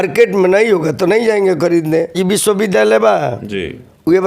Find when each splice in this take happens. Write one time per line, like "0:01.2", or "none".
0:02.2